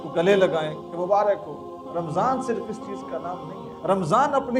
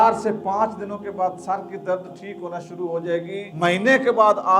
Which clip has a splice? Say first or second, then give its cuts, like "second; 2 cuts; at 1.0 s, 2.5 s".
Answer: second; 1 cut; at 3.5 s